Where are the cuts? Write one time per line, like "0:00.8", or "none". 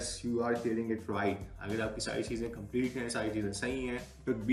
none